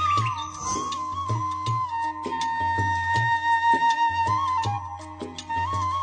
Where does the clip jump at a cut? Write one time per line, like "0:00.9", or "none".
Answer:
none